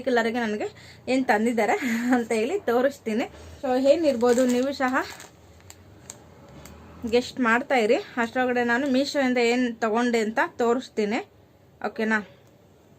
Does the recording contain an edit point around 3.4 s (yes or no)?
yes